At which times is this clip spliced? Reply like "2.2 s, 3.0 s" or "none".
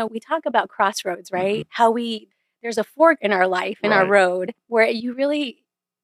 1.7 s, 4.6 s